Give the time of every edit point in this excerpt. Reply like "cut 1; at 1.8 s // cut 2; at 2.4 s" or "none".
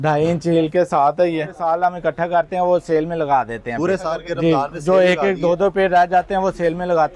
cut 1; at 1.5 s